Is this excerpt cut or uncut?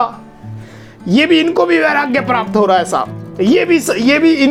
uncut